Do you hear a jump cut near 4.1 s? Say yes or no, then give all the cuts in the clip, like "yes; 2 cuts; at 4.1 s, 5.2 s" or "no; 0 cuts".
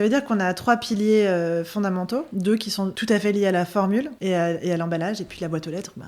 yes; 2 cuts; at 2.3 s, 4.1 s